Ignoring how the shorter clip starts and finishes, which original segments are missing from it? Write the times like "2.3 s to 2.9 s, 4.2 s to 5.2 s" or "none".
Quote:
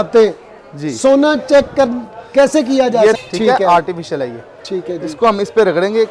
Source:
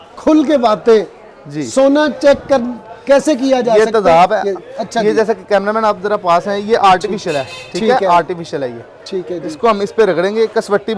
3.9 s to 7.6 s